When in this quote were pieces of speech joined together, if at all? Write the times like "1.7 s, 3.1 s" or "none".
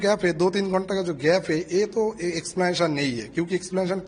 none